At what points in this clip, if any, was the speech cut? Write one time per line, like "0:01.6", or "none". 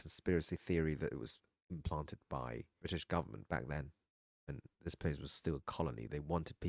0:02.7